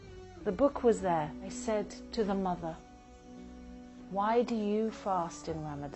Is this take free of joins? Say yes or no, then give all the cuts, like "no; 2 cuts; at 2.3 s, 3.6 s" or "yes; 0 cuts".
no; 1 cut; at 1.5 s